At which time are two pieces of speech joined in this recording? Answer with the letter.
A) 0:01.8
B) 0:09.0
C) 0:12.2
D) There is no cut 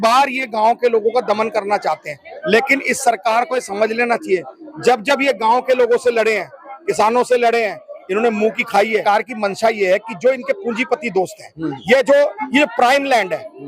B